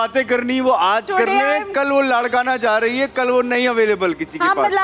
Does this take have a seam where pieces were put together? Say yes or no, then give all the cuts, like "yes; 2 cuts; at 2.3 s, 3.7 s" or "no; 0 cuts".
no; 0 cuts